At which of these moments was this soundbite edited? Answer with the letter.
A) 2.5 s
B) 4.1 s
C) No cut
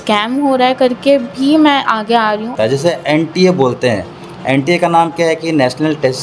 A